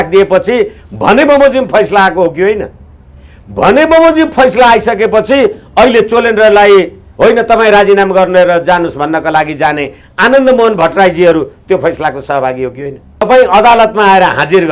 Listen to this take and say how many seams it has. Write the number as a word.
one